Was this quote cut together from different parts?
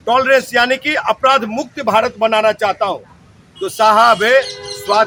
no; 0 cuts

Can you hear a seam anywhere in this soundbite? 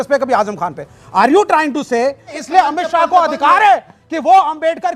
yes; 1 cut; at 2.3 s

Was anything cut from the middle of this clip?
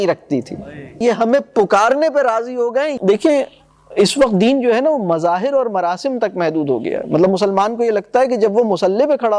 yes; 2 cuts; at 1.0 s, 2.9 s

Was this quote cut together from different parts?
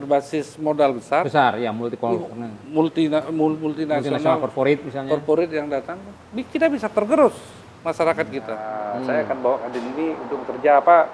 yes; 1 cut; at 8.7 s

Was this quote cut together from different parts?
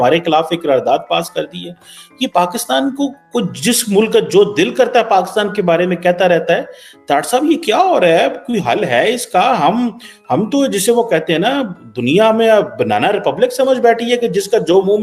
no; 0 cuts

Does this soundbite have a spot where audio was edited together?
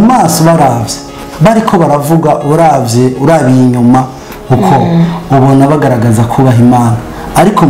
no; 0 cuts

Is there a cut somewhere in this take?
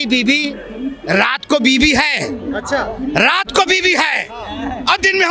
no; 0 cuts

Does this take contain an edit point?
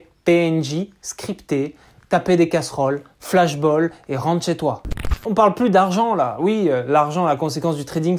yes; 1 cut; at 4.8 s

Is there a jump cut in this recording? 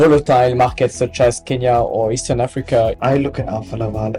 yes; 1 cut; at 3.0 s

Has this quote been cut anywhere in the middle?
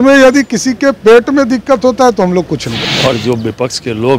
yes; 1 cut; at 2.7 s

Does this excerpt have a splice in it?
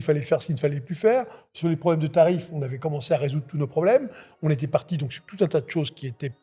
no; 0 cuts

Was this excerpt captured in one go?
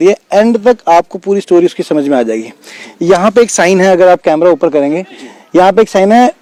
yes; 0 cuts

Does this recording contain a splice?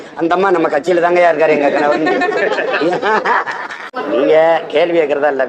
yes; 1 cut; at 3.9 s

